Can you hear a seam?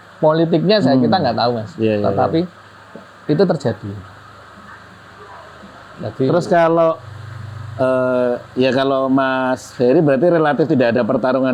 no; 0 cuts

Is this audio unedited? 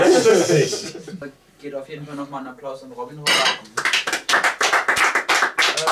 no; 1 cut; at 1.2 s

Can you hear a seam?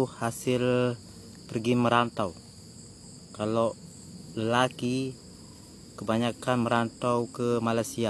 no; 0 cuts

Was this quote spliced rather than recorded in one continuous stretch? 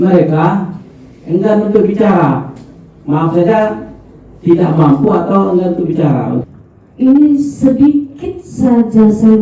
yes; 1 cut; at 6.4 s

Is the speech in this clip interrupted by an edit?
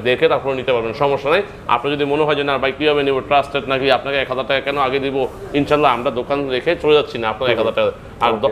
no; 0 cuts

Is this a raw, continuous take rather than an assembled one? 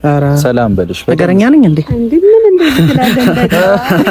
yes; 0 cuts

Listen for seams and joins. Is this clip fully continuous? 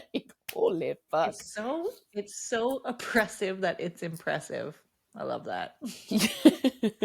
yes; 0 cuts

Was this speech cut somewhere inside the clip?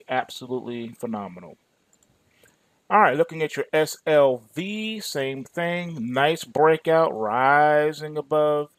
no; 0 cuts

